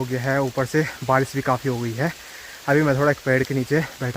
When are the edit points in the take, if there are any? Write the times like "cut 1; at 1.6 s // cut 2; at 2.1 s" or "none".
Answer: none